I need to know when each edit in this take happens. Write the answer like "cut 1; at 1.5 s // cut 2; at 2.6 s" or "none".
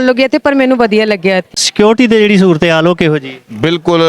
cut 1; at 1.6 s